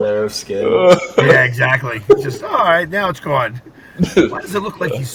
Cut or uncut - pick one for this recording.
uncut